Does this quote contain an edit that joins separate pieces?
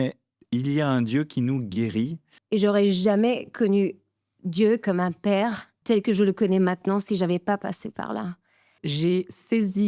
yes; 3 cuts; at 2.3 s, 5.7 s, 8.8 s

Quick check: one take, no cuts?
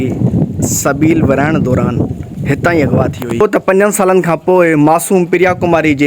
no; 1 cut; at 3.4 s

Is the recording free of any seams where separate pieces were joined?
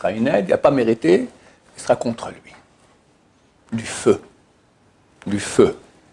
yes; 0 cuts

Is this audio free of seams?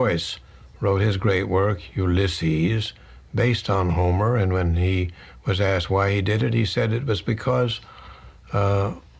no; 1 cut; at 6.0 s

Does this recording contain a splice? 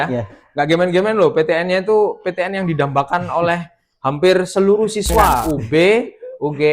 yes; 1 cut; at 5.4 s

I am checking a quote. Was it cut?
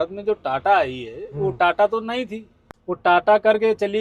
no; 0 cuts

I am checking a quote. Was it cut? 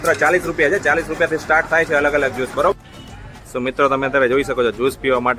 no; 0 cuts

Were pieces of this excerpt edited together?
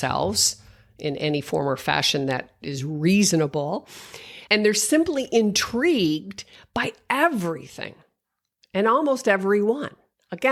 no; 0 cuts

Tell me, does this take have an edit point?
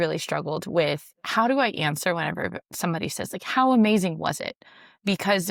no; 0 cuts

